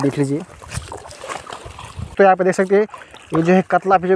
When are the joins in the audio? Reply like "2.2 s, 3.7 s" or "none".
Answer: 2.1 s